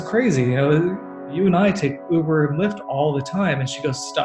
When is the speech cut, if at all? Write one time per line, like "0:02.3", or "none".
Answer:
0:01.2